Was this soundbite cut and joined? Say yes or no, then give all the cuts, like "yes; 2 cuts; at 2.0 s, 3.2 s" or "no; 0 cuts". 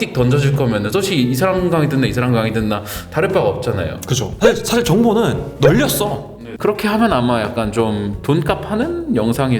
yes; 2 cuts; at 4.2 s, 6.2 s